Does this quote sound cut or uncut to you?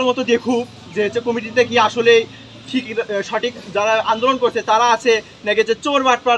uncut